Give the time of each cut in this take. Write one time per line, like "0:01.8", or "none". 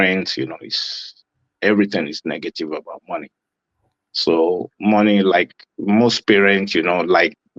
none